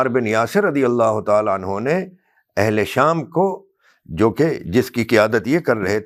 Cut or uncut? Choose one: uncut